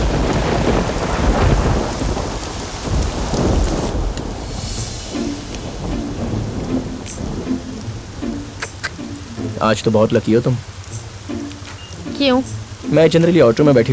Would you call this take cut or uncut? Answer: uncut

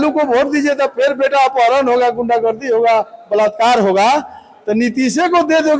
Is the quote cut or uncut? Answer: uncut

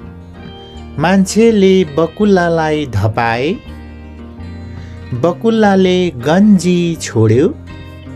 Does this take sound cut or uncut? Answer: cut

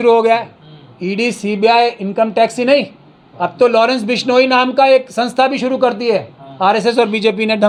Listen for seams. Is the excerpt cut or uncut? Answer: uncut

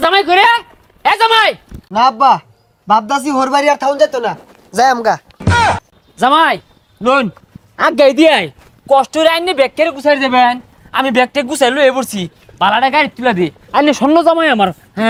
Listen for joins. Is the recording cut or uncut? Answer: uncut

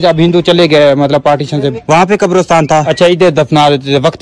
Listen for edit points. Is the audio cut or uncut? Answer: cut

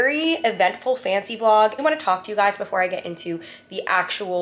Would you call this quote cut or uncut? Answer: cut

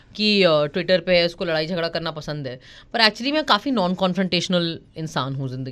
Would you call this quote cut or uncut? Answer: uncut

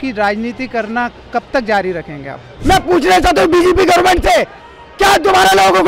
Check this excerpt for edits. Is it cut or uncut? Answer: cut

